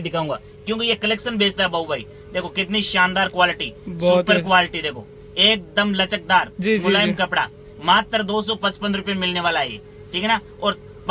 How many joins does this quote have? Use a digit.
0